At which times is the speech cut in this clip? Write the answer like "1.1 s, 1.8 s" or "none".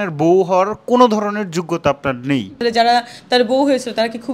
none